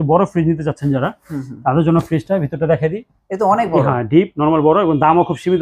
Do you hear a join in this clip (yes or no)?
no